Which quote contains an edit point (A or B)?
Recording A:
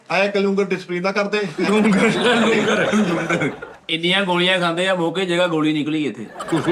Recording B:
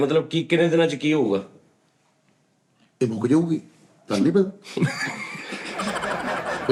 A